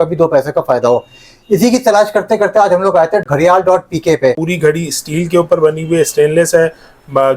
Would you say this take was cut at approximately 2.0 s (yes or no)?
no